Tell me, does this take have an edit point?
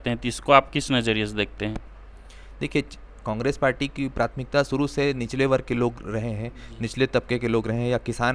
no; 0 cuts

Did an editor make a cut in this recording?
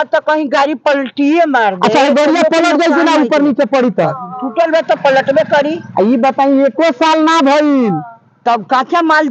no; 0 cuts

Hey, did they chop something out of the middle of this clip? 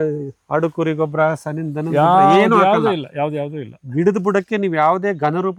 no; 0 cuts

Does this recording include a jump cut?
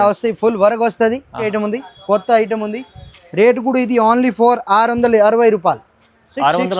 yes; 1 cut; at 1.5 s

